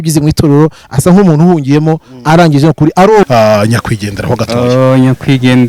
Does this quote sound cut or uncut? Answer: cut